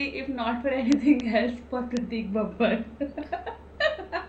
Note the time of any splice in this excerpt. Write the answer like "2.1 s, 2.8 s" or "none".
none